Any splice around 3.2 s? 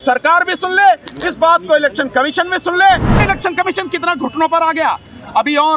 yes; 1 cut; at 3.2 s

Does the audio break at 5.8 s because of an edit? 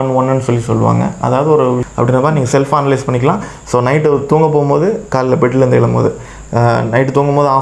no; 1 cut; at 1.9 s

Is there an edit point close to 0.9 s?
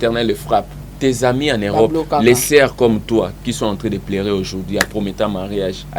yes; 1 cut; at 0.9 s

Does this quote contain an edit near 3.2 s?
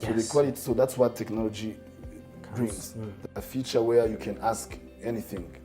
yes; 1 cut; at 3.2 s

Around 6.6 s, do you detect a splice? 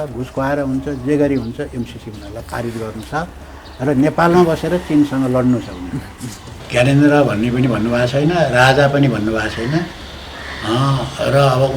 yes; 1 cut; at 6.6 s

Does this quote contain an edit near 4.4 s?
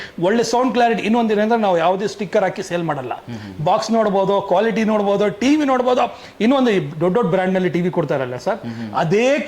no; 0 cuts

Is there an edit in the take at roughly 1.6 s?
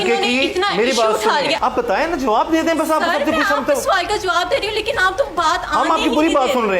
yes; 1 cut; at 1.6 s

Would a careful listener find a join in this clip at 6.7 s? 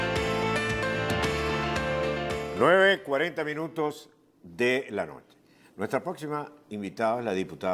no; 1 cut; at 1.4 s

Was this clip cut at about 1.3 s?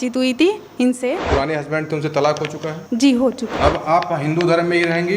yes; 3 cuts; at 1.3 s, 2.7 s, 3.5 s

